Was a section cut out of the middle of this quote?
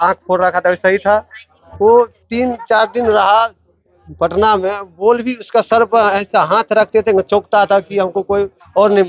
no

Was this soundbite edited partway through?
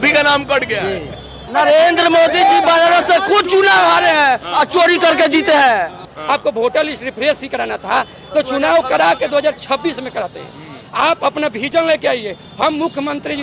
yes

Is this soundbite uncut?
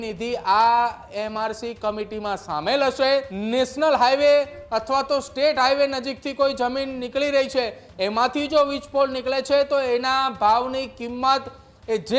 no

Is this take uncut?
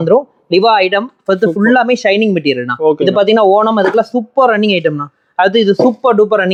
yes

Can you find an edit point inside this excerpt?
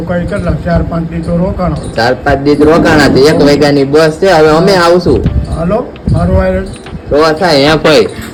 no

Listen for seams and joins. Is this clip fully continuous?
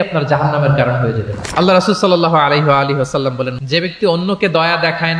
no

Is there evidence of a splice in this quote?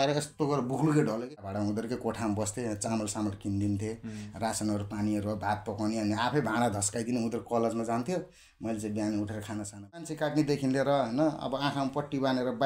yes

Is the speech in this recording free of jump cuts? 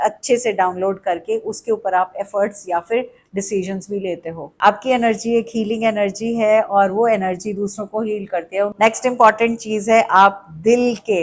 no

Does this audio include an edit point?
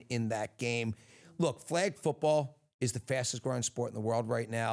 no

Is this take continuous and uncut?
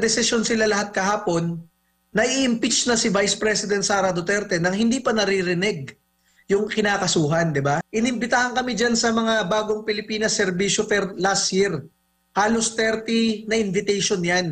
no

